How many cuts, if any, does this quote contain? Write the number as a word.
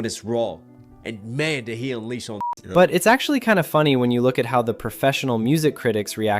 one